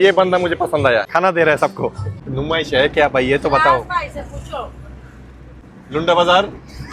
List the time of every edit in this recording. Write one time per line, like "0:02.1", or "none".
0:01.1
0:02.2
0:05.6